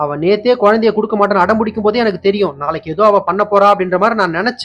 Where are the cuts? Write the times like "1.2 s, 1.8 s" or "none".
none